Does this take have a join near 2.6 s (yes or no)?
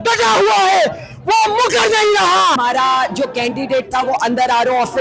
yes